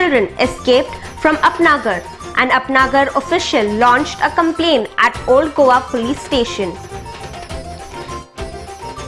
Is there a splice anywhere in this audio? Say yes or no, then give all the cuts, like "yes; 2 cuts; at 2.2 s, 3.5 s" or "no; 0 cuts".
no; 0 cuts